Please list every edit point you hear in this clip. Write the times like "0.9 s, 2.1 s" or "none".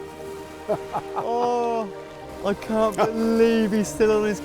2.3 s